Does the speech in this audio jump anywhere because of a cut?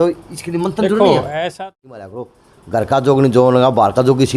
yes; 1 cut; at 1.6 s

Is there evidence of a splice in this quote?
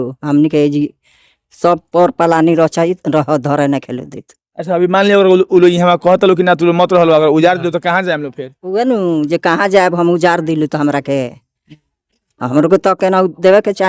no; 0 cuts

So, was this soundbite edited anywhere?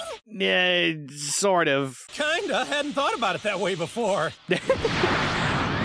no; 0 cuts

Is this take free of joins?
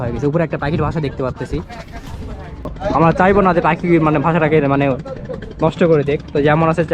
no; 1 cut; at 2.7 s

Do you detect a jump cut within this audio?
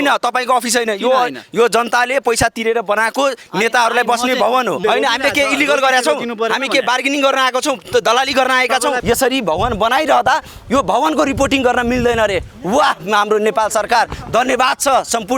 yes; 2 cuts; at 4.8 s, 9.0 s

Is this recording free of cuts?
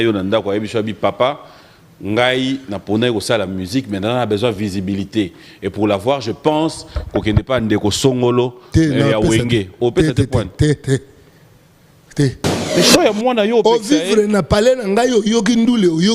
no; 1 cut; at 12.5 s

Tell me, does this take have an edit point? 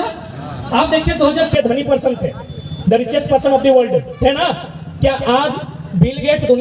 yes; 1 cut; at 1.5 s

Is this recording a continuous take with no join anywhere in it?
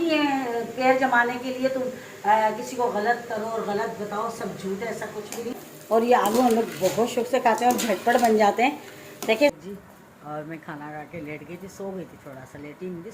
no; 2 cuts; at 5.5 s, 9.5 s

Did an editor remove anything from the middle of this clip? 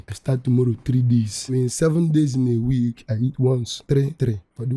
yes; 2 cuts; at 1.5 s, 3.5 s

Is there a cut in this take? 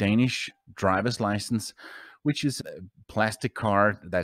no; 0 cuts

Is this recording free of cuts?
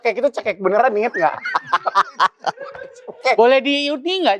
yes; 0 cuts

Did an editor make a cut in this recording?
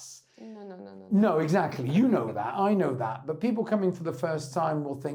no; 0 cuts

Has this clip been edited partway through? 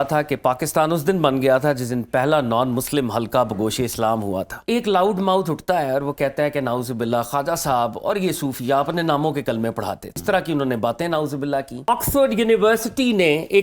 yes; 3 cuts; at 4.5 s, 10.2 s, 11.9 s

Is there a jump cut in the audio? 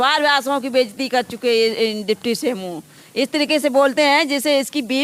no; 0 cuts

